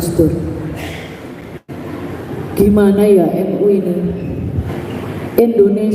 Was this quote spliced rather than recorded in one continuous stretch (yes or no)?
yes